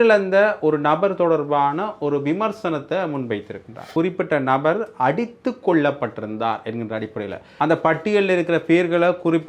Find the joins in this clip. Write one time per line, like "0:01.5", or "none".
0:03.8
0:07.4